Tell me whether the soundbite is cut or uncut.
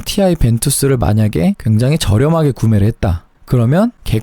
uncut